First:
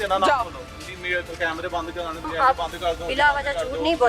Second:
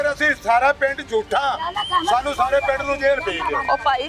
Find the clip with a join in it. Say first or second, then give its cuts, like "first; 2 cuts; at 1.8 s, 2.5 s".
first; 1 cut; at 2.2 s